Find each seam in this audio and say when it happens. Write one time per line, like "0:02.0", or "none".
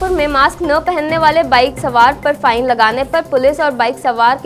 none